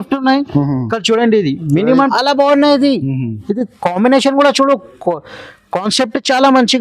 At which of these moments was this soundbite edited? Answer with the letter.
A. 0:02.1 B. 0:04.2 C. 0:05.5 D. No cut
A